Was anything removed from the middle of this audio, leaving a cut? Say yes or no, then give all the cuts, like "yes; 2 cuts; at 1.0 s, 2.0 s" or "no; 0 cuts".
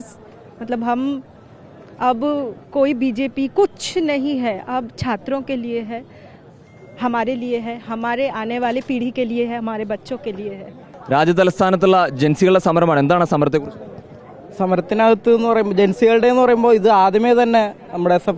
no; 0 cuts